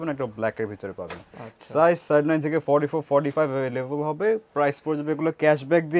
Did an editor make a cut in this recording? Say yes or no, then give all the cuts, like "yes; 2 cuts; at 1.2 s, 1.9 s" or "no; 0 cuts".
no; 0 cuts